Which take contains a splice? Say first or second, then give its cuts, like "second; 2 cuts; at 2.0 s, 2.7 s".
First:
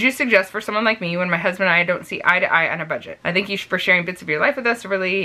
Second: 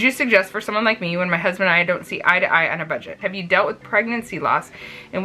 second; 1 cut; at 3.2 s